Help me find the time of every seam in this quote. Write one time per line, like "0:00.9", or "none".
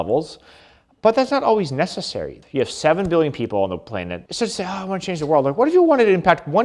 0:02.3
0:04.2

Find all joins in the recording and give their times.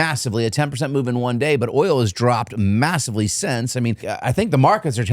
0:04.1

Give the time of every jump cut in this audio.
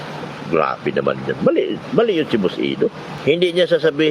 0:03.1

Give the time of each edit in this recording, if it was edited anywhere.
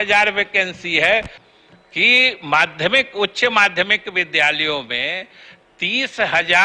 0:01.4

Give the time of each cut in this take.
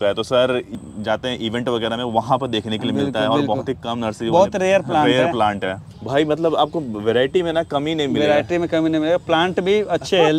0:00.8
0:05.9

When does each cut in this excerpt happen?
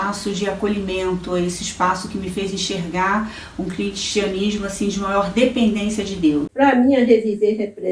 0:06.5

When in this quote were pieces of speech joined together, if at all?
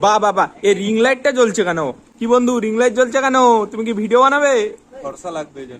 0:02.1

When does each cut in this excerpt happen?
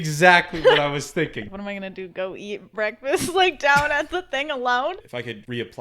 0:01.4
0:05.0

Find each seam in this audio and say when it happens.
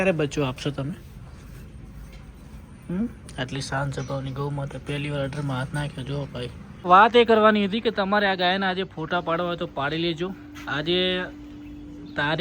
0:06.8

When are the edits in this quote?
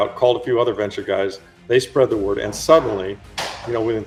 none

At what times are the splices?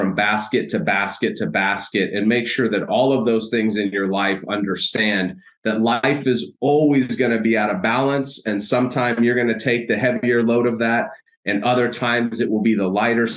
none

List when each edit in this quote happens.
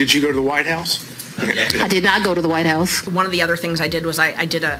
0:03.1

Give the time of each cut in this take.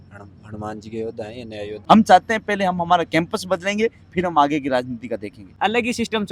0:01.7
0:05.4

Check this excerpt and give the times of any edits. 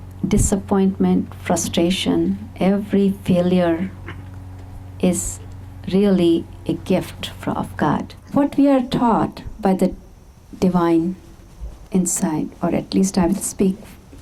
0:08.2

